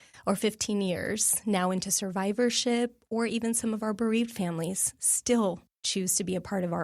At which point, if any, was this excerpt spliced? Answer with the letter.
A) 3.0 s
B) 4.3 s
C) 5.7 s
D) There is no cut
C